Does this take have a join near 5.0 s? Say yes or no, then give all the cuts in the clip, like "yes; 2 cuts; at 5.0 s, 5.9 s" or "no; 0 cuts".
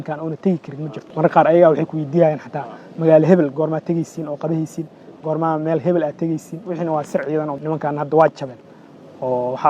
no; 2 cuts; at 1.1 s, 7.6 s